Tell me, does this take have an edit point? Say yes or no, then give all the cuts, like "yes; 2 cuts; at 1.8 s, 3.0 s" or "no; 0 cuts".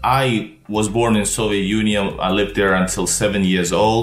no; 0 cuts